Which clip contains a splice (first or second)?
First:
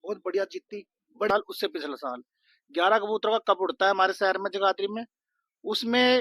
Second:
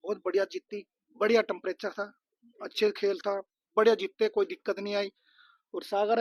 first